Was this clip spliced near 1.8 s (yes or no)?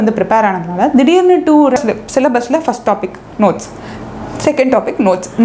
yes